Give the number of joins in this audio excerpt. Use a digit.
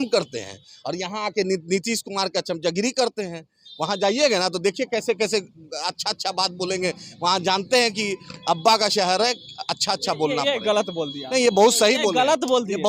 0